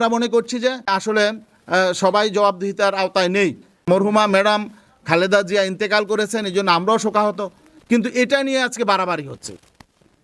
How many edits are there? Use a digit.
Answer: 2